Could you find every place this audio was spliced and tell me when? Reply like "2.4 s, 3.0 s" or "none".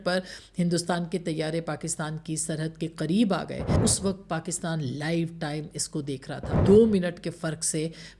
3.8 s, 6.5 s